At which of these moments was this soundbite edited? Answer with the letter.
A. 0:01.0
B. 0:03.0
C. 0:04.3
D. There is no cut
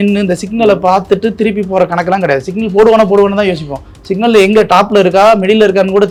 D